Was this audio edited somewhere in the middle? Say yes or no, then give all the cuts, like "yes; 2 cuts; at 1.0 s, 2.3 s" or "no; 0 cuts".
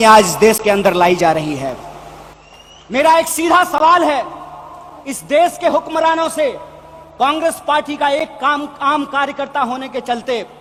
no; 0 cuts